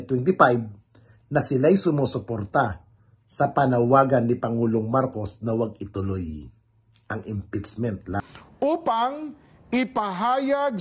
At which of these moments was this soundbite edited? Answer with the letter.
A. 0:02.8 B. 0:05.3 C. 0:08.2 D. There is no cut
C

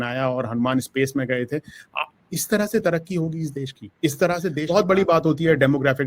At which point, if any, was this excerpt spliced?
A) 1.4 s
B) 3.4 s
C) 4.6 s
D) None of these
C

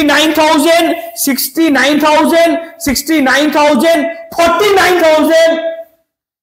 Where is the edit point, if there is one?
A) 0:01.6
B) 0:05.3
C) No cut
C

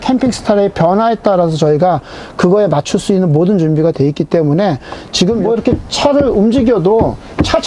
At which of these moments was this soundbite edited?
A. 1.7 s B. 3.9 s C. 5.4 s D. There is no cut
C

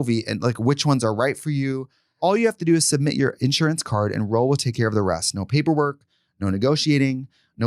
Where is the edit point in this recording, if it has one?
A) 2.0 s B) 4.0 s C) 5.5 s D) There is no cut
A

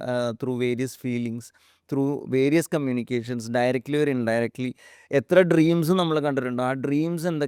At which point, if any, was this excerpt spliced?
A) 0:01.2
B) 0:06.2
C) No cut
C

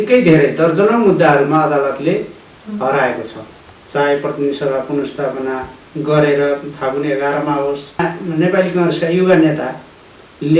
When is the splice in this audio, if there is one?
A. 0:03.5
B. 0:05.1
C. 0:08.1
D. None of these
C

